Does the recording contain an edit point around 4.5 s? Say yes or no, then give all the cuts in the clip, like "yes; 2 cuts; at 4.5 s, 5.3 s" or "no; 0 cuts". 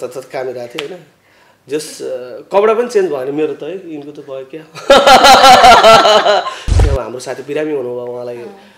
no; 1 cut; at 6.8 s